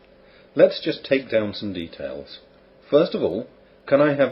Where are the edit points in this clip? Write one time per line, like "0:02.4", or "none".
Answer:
0:01.5